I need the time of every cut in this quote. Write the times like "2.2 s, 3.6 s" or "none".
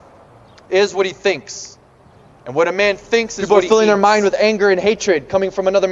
3.4 s